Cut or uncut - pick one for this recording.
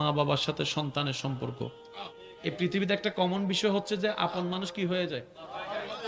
cut